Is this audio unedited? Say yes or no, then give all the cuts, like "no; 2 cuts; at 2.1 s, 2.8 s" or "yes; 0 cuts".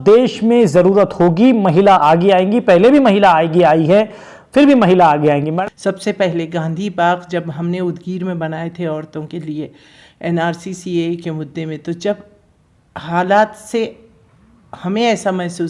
no; 1 cut; at 5.5 s